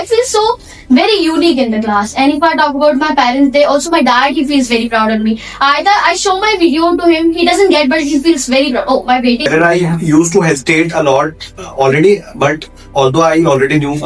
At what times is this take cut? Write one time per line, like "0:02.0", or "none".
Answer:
0:09.5